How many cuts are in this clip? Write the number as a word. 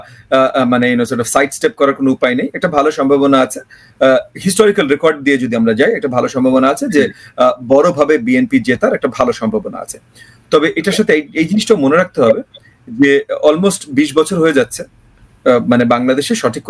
zero